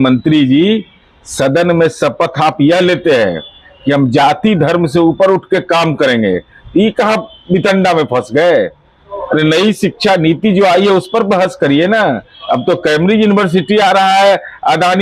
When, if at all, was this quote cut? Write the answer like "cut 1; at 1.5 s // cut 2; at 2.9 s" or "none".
none